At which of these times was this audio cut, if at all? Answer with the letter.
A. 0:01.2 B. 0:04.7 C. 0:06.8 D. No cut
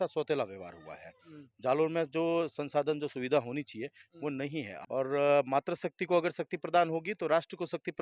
B